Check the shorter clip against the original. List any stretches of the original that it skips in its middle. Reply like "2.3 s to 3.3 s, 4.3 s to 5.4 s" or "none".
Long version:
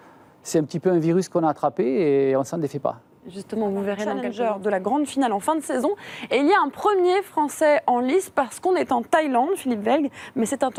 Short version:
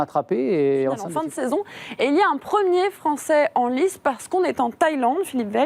2.6 s to 5.4 s